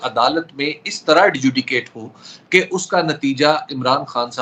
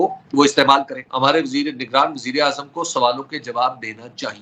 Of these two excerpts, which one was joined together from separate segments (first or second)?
second